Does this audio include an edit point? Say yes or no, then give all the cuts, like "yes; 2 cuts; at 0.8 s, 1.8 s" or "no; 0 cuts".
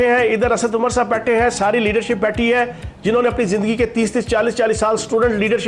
no; 0 cuts